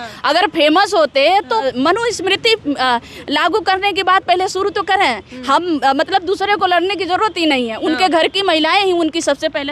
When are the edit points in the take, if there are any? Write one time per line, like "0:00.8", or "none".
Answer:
0:01.6